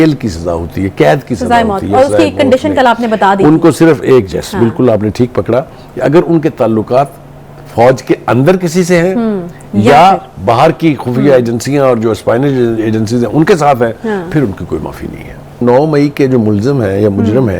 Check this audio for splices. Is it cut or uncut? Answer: cut